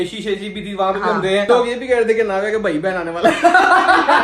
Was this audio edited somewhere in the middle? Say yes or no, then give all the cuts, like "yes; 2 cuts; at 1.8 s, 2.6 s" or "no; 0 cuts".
yes; 1 cut; at 1.5 s